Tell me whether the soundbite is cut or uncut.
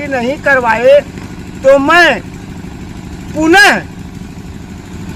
uncut